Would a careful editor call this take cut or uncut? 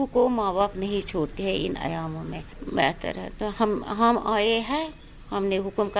uncut